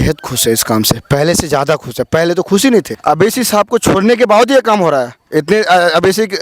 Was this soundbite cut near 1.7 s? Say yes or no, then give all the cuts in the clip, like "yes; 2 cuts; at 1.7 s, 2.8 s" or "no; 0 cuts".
no; 1 cut; at 2.9 s